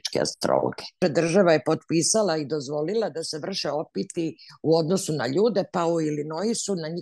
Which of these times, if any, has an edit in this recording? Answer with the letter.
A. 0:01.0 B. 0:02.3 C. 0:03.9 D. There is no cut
A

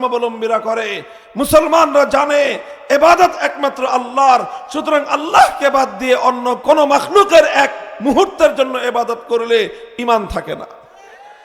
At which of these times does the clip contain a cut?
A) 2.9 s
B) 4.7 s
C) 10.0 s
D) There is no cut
D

